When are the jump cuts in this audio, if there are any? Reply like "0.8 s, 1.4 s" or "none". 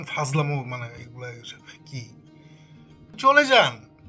2.5 s